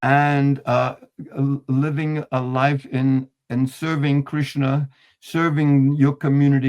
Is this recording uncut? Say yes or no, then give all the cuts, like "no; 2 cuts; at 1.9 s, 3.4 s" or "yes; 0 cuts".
yes; 0 cuts